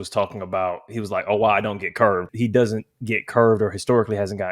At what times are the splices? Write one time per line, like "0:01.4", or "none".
0:02.3